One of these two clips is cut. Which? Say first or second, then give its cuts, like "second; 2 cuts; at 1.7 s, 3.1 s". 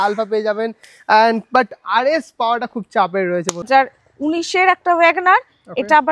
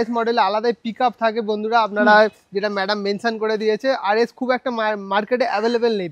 first; 1 cut; at 3.7 s